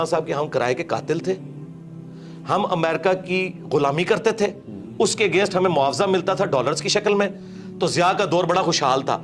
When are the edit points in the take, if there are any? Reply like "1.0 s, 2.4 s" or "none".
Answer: none